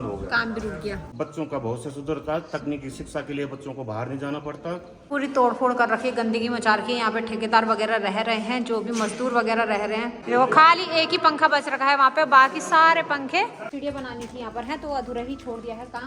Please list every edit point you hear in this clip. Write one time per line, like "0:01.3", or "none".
0:01.1
0:04.9
0:10.1
0:13.6